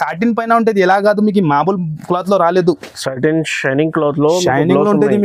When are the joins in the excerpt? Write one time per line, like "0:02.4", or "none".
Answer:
none